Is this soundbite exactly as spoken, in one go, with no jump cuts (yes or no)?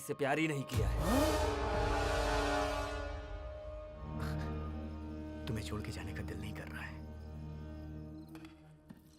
no